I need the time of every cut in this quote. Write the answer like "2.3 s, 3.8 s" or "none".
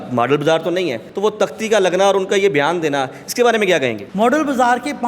1.0 s, 4.0 s